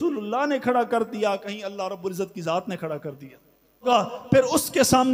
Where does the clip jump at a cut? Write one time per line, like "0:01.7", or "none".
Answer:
0:03.9